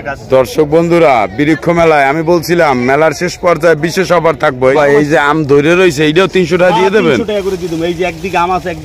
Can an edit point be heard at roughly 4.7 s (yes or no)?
yes